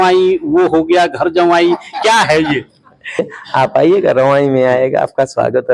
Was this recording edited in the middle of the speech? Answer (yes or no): yes